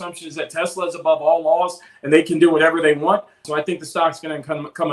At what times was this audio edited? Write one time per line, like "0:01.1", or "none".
0:01.9
0:03.4